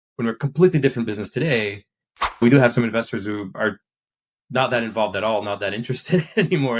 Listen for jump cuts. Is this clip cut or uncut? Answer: cut